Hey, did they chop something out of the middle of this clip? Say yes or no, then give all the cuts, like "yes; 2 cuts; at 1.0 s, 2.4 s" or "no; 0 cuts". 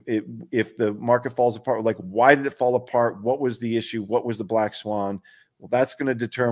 no; 0 cuts